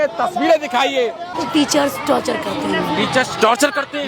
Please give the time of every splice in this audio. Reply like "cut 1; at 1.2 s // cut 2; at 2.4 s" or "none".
cut 1; at 1.3 s

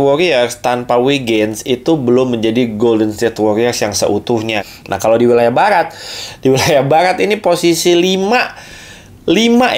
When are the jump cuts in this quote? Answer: cut 1; at 4.7 s

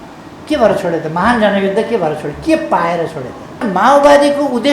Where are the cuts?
cut 1; at 3.6 s

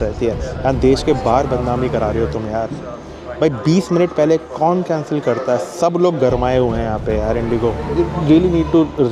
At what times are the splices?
cut 1; at 7.8 s

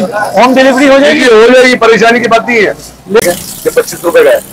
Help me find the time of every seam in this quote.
cut 1; at 3.2 s

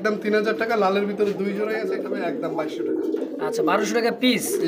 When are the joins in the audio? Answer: cut 1; at 1.8 s

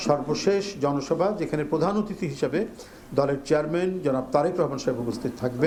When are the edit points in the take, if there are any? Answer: none

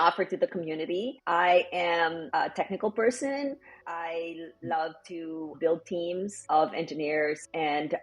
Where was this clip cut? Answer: cut 1; at 1.2 s // cut 2; at 2.2 s // cut 3; at 3.8 s // cut 4; at 5.5 s // cut 5; at 6.4 s

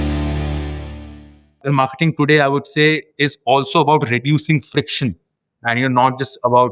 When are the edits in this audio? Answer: cut 1; at 1.6 s

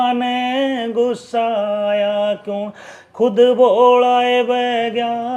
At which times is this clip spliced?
none

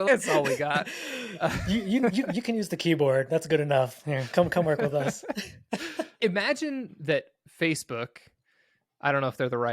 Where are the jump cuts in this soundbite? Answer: cut 1; at 6.0 s

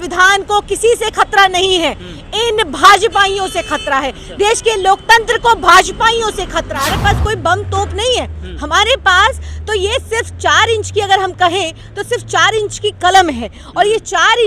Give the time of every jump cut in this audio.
cut 1; at 6.7 s

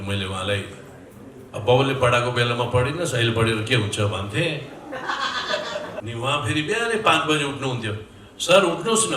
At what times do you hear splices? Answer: cut 1; at 6.0 s

